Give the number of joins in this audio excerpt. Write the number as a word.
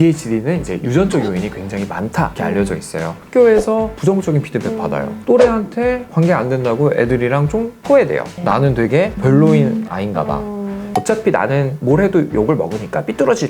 three